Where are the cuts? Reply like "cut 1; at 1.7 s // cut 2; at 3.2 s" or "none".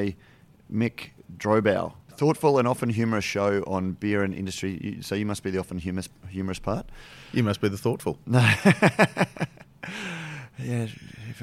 cut 1; at 2.0 s